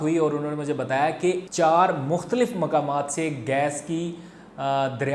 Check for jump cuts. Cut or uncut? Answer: cut